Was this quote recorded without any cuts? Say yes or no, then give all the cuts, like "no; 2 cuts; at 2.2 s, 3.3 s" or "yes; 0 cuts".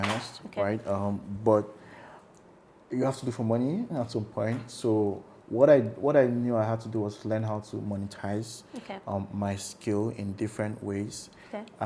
yes; 0 cuts